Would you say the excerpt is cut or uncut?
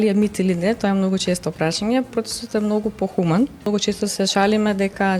cut